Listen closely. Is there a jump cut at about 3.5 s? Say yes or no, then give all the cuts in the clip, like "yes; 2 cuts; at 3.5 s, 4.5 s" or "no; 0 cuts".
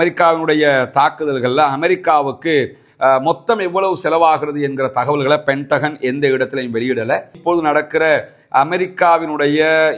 no; 1 cut; at 7.4 s